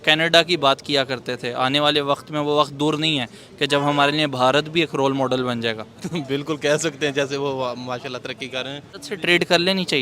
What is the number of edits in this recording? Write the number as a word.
one